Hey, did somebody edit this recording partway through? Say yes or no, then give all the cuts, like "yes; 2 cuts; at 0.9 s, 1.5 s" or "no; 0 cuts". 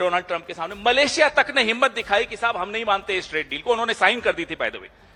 no; 0 cuts